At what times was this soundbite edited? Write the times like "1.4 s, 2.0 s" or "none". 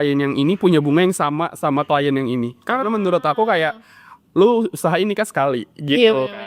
none